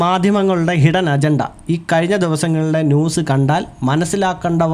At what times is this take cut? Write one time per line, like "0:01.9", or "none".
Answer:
none